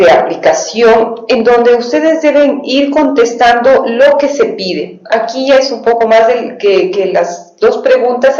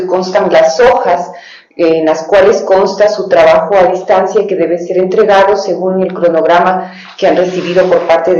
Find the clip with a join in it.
first; 1 cut; at 1.4 s

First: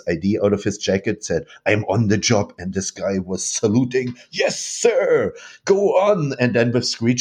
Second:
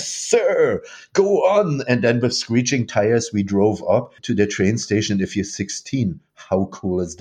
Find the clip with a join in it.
second; 1 cut; at 4.2 s

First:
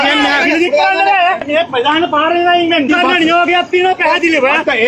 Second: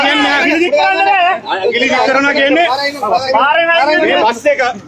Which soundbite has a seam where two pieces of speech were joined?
first; 2 cuts; at 1.4 s, 2.9 s

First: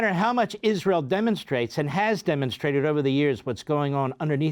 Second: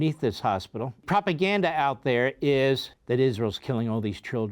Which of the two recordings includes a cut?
second; 2 cuts; at 1.0 s, 2.9 s

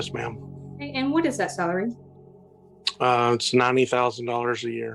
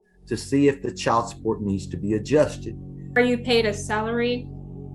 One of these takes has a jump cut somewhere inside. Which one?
second; 1 cut; at 3.2 s

